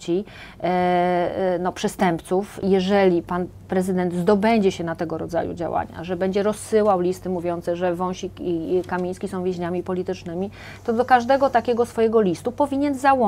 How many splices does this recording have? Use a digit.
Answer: 1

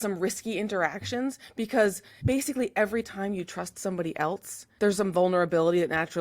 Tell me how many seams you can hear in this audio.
2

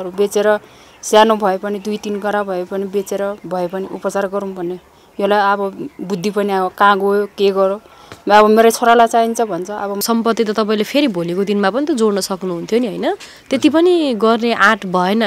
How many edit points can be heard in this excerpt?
1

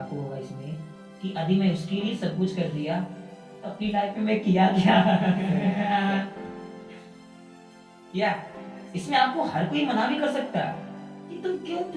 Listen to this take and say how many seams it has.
0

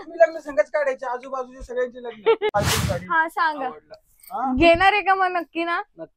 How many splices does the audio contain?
1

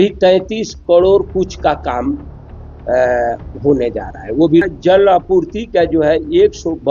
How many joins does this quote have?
1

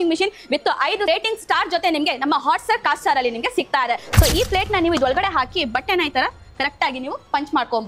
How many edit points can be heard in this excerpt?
1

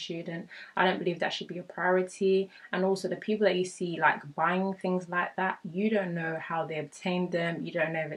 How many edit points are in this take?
0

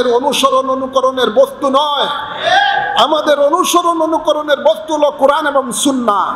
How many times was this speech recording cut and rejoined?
0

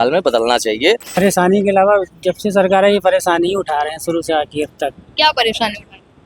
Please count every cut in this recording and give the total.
1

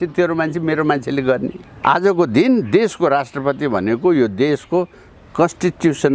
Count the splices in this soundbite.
1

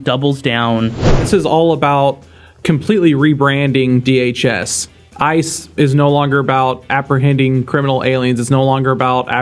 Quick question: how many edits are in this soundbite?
1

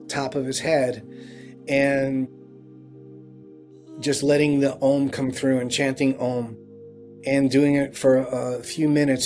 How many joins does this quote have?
0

